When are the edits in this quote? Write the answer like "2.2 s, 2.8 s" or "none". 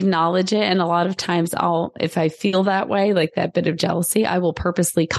none

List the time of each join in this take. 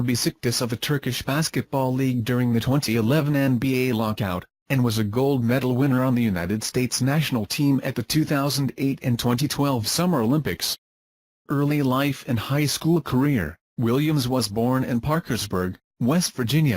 12.4 s

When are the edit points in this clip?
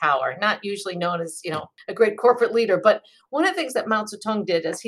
1.8 s

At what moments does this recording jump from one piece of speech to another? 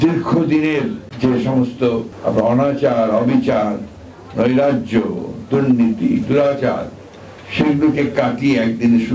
1.0 s, 2.1 s

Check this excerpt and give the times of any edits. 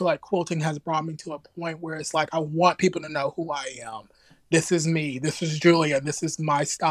none

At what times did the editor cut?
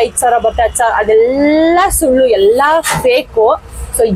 none

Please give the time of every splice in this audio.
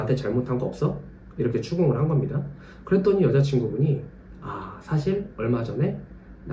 none

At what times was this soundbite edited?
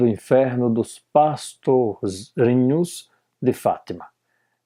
none

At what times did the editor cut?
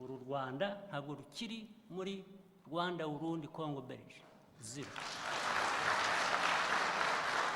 none

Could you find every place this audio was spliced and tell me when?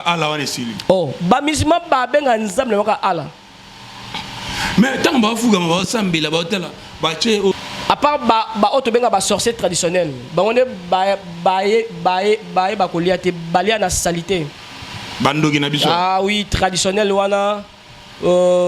7.5 s

